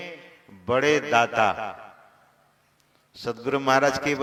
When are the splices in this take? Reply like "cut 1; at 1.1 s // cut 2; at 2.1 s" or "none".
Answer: none